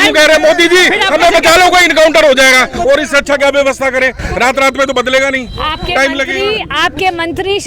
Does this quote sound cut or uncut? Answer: uncut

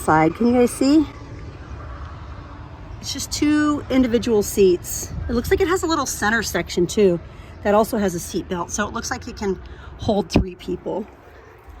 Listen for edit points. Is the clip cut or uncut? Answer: uncut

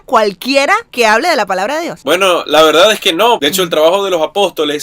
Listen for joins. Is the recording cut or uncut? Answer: cut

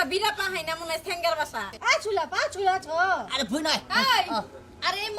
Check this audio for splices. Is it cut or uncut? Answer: cut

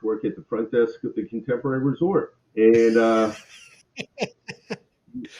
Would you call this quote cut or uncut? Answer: cut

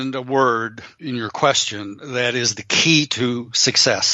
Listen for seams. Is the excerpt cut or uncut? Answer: cut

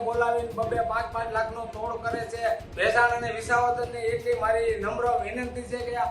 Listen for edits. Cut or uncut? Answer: cut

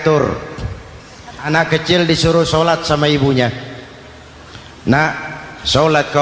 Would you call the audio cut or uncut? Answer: cut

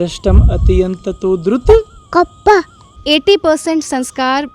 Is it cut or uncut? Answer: cut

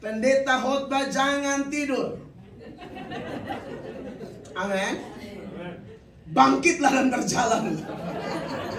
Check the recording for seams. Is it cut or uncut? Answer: uncut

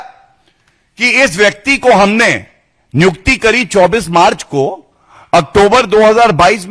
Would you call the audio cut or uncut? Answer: uncut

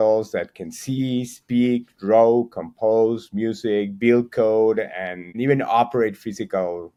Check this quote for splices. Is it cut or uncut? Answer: uncut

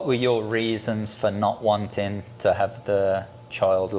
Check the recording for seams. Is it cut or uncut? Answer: uncut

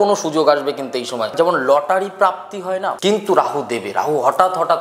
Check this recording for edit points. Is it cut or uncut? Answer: cut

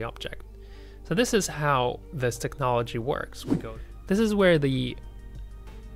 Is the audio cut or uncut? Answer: cut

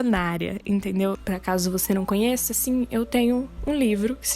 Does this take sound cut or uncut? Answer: cut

